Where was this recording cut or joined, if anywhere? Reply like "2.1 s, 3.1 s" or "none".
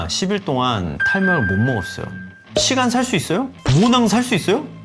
2.6 s